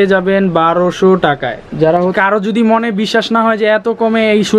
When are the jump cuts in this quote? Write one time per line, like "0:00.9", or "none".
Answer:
0:02.1